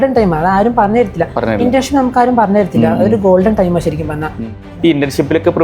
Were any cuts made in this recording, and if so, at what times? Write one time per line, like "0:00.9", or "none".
0:04.5